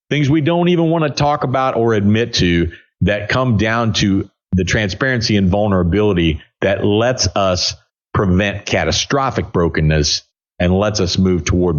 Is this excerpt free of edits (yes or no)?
yes